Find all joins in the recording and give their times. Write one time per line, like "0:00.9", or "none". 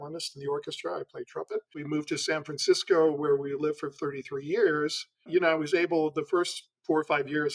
0:01.8
0:05.2